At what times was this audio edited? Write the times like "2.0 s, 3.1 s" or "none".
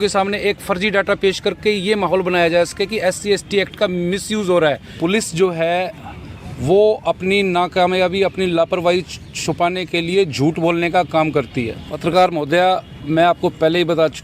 4.9 s, 11.9 s